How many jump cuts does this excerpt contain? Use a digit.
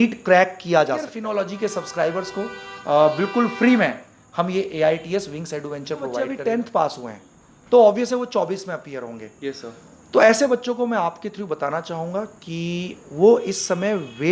2